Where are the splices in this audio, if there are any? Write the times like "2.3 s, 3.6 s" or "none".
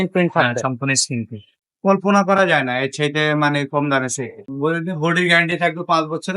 1.5 s, 4.4 s